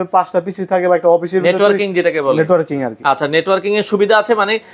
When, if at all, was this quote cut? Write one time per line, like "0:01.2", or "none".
none